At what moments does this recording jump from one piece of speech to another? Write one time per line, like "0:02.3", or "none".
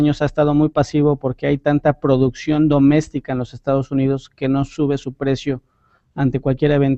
0:04.3